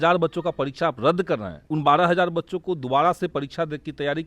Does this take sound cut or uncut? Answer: cut